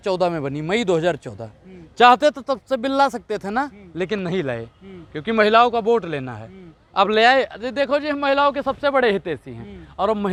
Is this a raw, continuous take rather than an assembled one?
yes; 0 cuts

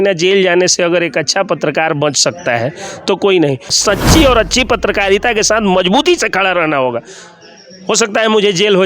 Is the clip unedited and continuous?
no; 1 cut; at 3.8 s

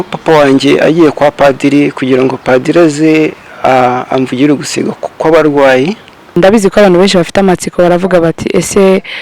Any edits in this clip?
yes; 1 cut; at 6.4 s

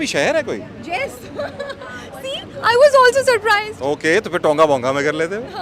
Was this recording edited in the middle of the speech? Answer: no; 0 cuts

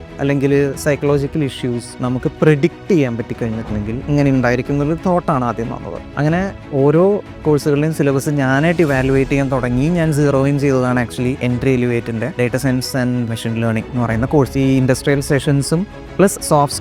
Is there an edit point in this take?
yes; 5 cuts; at 4.1 s, 6.0 s, 11.4 s, 13.3 s, 14.5 s

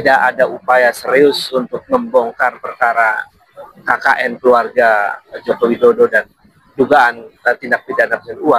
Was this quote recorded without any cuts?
yes; 0 cuts

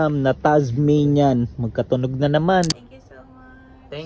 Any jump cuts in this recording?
yes; 1 cut; at 2.7 s

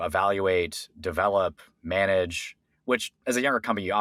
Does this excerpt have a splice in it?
no; 0 cuts

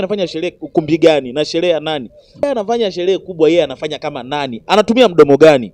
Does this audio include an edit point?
yes; 1 cut; at 2.4 s

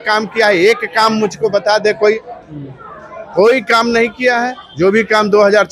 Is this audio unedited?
yes; 0 cuts

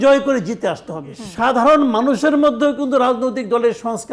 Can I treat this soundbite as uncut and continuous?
no; 1 cut; at 1.2 s

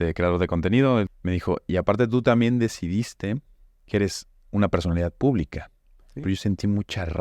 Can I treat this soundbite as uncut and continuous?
no; 2 cuts; at 1.1 s, 6.1 s

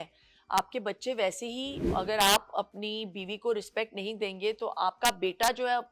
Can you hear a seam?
yes; 1 cut; at 1.9 s

